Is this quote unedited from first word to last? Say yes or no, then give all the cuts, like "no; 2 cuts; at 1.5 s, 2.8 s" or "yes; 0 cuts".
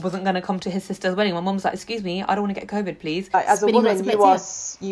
no; 1 cut; at 3.3 s